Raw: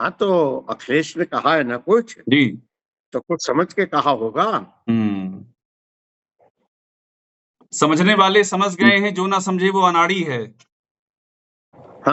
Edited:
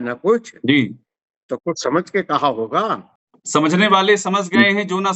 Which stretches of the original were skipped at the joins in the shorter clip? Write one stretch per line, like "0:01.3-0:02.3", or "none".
0:04.7-0:07.4